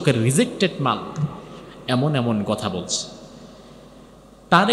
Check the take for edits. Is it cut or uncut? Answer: uncut